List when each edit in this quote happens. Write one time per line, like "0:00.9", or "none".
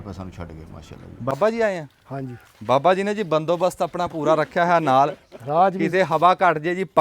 0:01.3